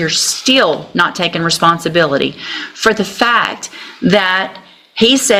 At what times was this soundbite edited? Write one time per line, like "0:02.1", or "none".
none